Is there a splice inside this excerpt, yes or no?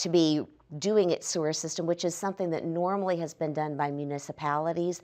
no